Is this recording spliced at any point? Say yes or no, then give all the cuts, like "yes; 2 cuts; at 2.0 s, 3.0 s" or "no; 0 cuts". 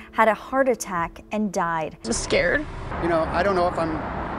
yes; 2 cuts; at 1.9 s, 2.9 s